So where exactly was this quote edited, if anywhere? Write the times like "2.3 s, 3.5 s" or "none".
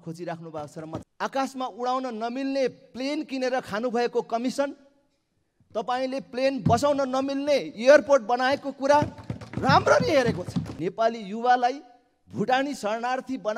1.0 s, 10.6 s